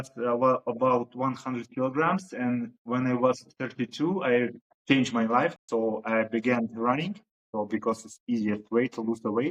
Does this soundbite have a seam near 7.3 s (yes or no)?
no